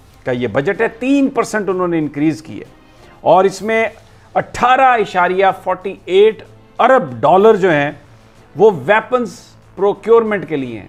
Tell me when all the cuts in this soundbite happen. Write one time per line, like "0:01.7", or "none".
none